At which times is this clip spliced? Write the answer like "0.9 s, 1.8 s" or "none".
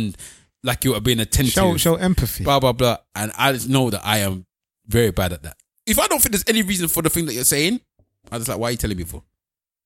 5.7 s